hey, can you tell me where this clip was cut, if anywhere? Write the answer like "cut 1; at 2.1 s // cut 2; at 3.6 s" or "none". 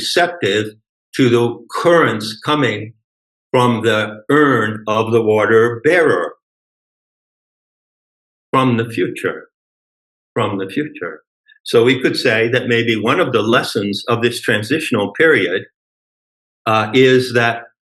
none